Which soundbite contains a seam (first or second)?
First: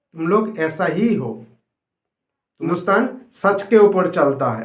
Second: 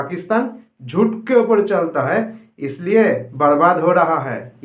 first